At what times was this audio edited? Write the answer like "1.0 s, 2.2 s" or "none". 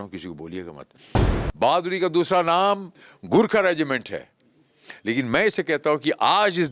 1.2 s